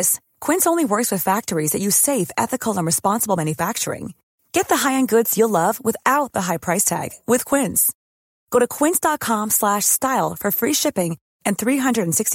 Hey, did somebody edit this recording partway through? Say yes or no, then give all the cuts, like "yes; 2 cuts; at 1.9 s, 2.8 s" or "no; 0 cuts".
no; 0 cuts